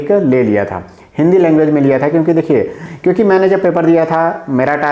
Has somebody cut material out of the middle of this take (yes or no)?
yes